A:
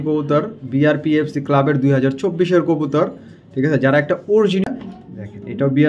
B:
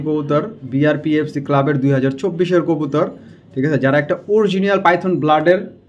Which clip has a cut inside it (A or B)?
A